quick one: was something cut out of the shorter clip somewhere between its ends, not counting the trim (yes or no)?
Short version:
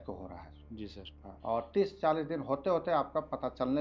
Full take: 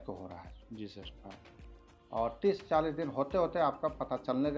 yes